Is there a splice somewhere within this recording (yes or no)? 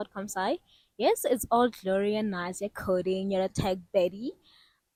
no